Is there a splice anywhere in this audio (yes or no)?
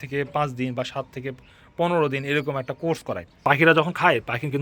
yes